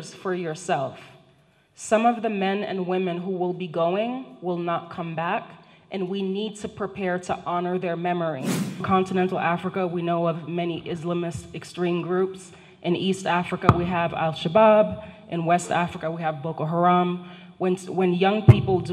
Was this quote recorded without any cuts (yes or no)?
no